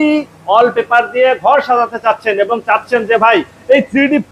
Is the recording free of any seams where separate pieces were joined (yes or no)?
yes